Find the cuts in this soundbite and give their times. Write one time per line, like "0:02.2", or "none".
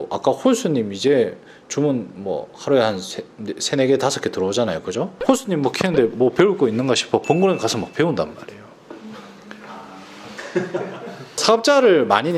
none